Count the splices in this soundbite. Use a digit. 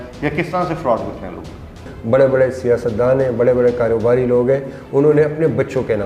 1